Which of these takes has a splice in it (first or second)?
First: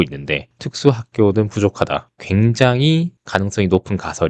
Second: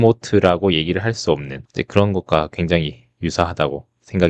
first